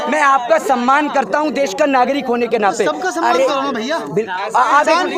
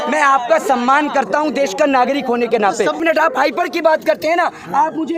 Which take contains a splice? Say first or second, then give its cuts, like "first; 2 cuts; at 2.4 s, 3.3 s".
second; 1 cut; at 3.0 s